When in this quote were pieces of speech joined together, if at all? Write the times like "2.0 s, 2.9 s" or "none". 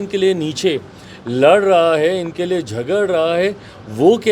none